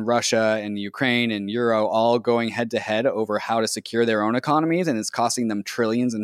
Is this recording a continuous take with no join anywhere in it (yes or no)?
yes